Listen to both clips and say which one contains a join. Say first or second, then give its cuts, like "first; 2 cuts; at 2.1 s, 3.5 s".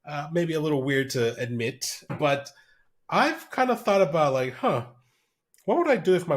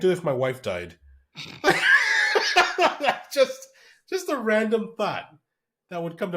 first; 1 cut; at 2.1 s